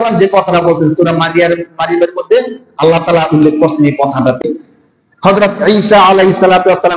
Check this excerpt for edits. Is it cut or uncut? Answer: cut